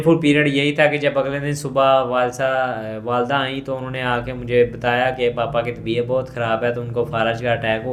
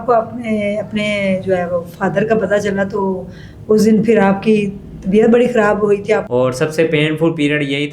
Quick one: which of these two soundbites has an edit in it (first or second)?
second